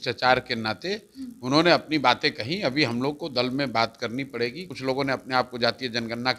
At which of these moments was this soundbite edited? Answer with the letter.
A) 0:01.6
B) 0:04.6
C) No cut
B